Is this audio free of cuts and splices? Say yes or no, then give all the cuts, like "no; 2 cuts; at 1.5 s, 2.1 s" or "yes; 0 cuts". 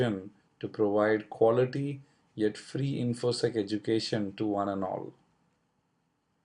no; 1 cut; at 1.7 s